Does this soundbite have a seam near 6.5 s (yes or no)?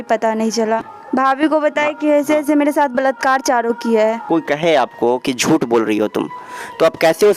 no